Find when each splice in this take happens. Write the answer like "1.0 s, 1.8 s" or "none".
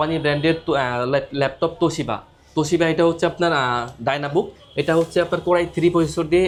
none